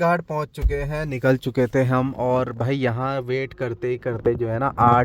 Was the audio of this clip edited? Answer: no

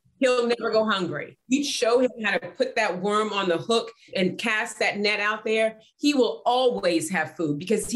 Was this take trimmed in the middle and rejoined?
yes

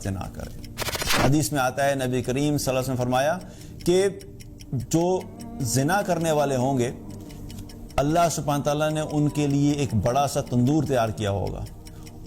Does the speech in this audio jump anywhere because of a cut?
yes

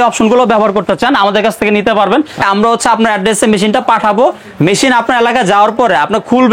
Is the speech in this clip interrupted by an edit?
yes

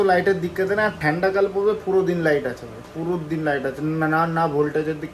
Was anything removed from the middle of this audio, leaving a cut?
no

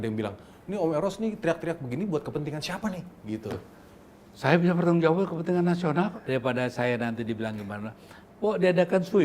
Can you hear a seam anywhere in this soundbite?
yes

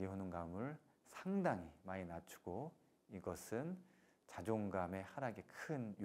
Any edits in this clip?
no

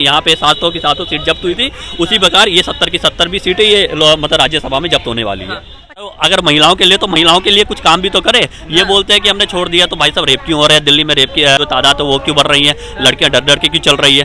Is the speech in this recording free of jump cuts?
no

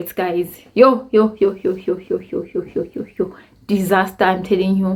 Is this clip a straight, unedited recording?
yes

